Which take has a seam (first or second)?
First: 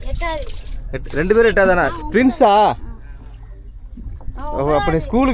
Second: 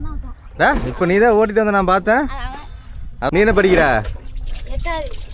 second